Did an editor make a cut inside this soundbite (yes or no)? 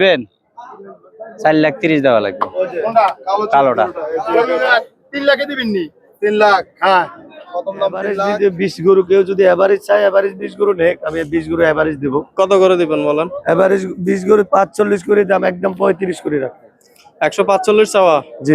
yes